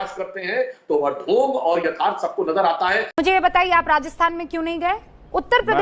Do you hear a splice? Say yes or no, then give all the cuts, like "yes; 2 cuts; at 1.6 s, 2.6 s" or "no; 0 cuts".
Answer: yes; 1 cut; at 3.2 s